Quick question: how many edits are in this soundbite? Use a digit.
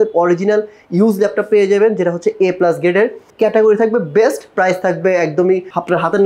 1